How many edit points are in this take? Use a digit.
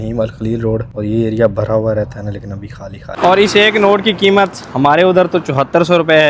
2